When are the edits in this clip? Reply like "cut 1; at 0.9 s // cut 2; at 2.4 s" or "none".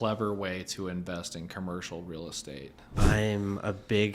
cut 1; at 3.0 s